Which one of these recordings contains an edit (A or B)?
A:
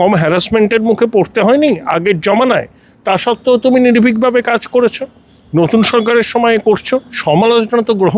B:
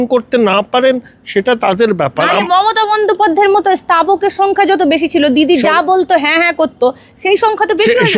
A